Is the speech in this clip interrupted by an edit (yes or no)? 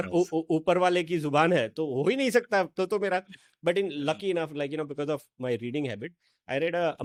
no